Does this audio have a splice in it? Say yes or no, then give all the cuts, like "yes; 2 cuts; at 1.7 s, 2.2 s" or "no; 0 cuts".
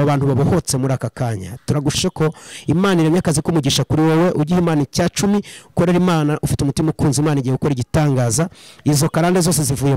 yes; 1 cut; at 2.0 s